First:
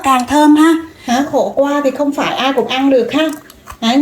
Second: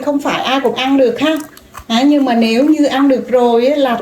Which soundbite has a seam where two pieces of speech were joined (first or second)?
first